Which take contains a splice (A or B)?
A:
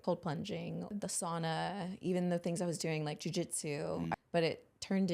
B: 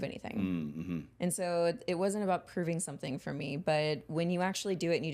A